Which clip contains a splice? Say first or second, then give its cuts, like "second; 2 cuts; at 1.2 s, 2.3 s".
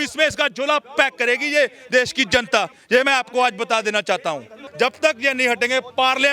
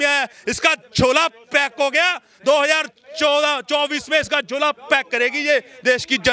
first; 1 cut; at 4.6 s